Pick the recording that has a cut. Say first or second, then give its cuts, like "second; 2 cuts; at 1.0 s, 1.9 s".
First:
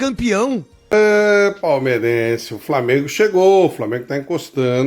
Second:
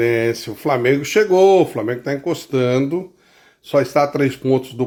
first; 1 cut; at 0.9 s